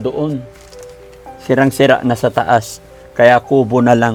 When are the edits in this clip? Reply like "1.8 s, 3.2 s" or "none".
none